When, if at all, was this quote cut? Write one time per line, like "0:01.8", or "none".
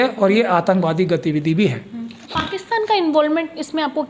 none